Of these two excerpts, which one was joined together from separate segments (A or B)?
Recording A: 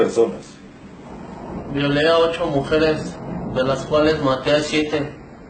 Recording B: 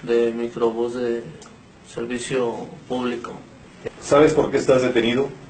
B